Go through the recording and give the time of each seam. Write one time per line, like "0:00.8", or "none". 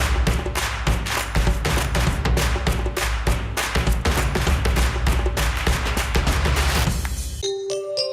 0:07.2